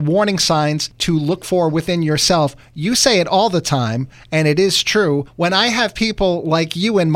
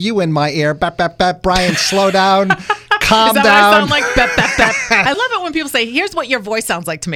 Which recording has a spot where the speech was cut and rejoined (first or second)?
first